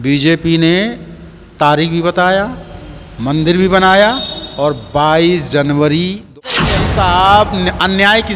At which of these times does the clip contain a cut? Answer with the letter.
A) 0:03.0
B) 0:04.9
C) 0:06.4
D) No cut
C